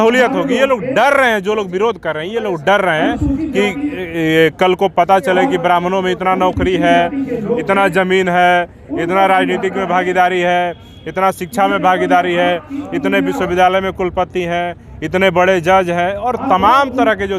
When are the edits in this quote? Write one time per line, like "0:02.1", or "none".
none